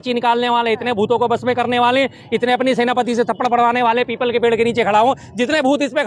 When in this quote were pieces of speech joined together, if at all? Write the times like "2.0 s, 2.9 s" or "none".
none